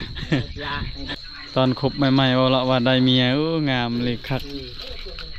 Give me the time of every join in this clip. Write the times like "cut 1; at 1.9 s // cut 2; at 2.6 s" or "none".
cut 1; at 1.1 s

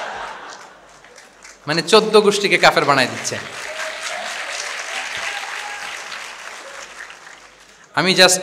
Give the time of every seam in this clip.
none

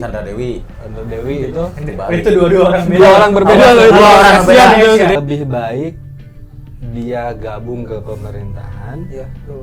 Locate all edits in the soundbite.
cut 1; at 5.1 s

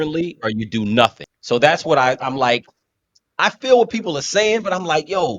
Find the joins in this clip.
cut 1; at 1.3 s

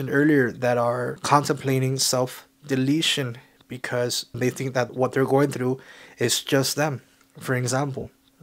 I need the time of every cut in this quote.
cut 1; at 1.2 s // cut 2; at 4.8 s

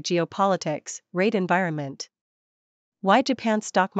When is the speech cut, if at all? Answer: cut 1; at 3.0 s

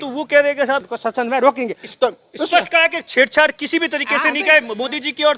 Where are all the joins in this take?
cut 1; at 0.9 s

